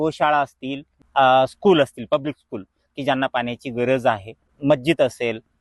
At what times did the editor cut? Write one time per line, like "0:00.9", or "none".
0:01.0
0:04.5